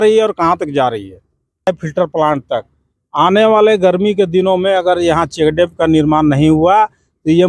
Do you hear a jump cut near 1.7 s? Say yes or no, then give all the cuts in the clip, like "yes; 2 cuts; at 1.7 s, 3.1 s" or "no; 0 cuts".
yes; 1 cut; at 1.7 s